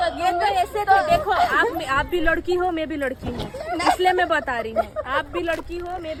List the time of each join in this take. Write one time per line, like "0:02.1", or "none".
none